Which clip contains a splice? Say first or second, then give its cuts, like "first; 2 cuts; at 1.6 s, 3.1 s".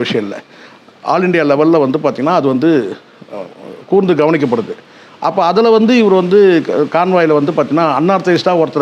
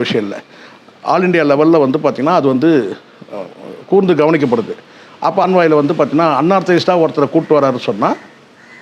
second; 1 cut; at 5.4 s